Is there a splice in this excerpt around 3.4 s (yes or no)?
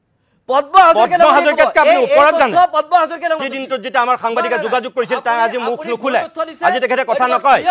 yes